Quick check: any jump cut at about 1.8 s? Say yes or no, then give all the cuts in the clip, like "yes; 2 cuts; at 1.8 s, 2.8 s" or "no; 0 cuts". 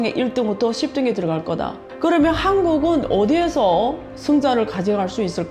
yes; 1 cut; at 1.8 s